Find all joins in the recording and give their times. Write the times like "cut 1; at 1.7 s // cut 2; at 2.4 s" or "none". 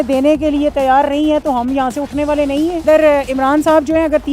cut 1; at 2.8 s